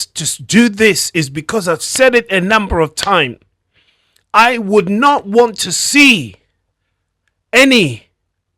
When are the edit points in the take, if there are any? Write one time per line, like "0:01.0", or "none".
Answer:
none